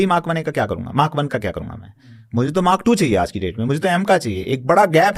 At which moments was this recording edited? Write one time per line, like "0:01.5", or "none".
none

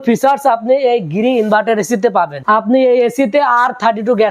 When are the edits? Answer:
0:02.4

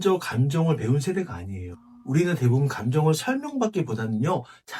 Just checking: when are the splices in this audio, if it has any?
none

